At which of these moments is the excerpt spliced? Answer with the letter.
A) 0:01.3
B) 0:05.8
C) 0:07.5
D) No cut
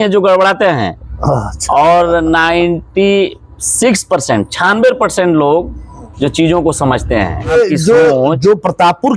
C